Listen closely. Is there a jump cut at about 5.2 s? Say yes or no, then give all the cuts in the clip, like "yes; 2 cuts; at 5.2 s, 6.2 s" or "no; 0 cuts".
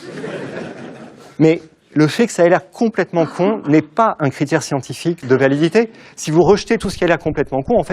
yes; 1 cut; at 5.2 s